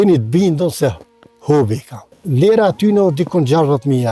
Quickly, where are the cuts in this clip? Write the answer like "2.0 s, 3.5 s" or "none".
2.2 s

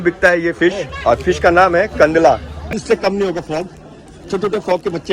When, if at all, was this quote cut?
2.7 s

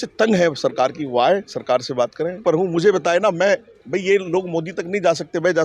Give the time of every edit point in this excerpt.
2.4 s

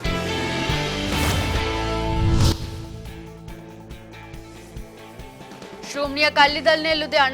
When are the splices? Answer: none

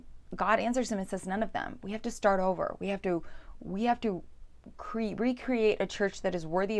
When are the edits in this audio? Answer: none

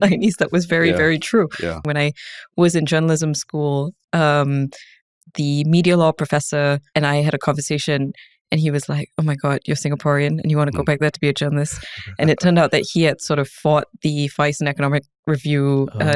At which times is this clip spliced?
1.8 s, 6.8 s

